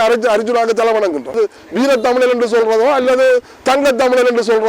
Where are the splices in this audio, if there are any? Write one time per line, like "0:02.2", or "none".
0:01.3